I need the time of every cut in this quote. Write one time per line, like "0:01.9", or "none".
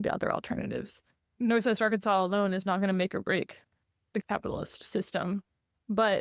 0:01.4
0:04.2

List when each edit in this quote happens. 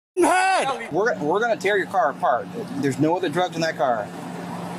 0:00.9

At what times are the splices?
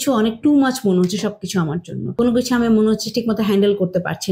0:02.0

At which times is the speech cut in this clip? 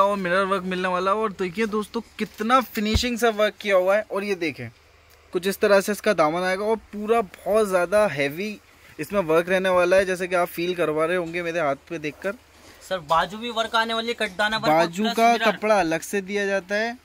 none

